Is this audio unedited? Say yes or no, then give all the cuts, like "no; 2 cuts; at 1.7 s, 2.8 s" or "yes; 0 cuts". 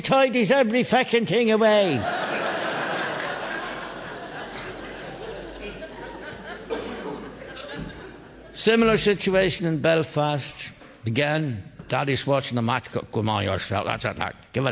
no; 1 cut; at 1.1 s